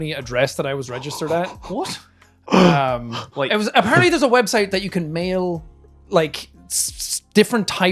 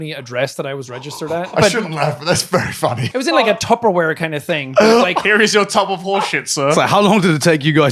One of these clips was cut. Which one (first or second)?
second